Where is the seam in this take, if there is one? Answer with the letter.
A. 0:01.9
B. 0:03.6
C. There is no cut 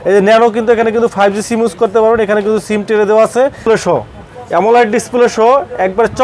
B